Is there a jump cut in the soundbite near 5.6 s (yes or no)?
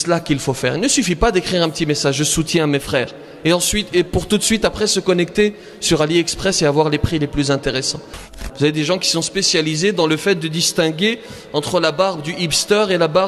no